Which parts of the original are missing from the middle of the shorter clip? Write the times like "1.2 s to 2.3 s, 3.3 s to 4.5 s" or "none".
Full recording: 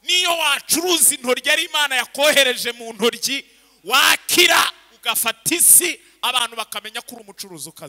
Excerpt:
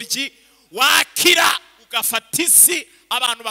none